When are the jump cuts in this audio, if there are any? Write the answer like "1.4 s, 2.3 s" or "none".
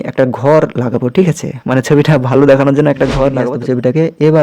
3.4 s